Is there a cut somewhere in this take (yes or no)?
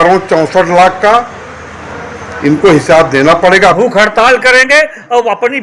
yes